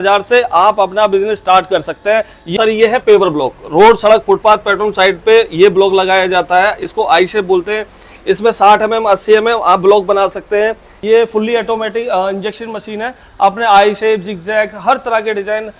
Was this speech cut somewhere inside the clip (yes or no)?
yes